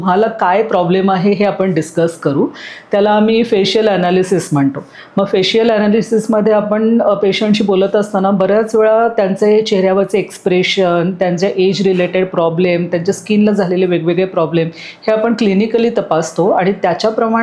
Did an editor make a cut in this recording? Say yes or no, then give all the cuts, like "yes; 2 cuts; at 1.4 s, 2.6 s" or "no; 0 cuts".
no; 0 cuts